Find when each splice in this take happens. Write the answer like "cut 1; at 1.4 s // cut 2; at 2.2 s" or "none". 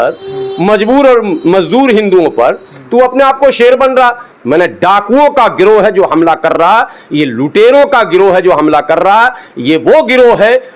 cut 1; at 4.3 s